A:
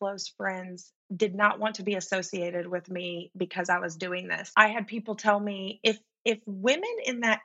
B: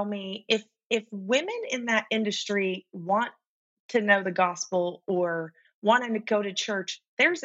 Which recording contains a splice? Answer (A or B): A